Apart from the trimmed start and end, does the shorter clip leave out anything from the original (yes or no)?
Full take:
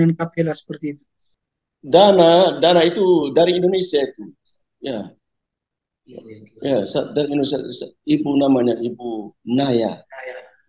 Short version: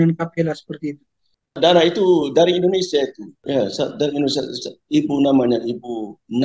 yes